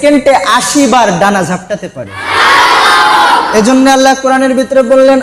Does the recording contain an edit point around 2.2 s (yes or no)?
yes